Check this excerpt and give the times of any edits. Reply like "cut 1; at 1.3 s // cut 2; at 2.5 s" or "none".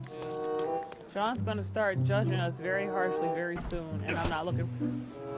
cut 1; at 0.9 s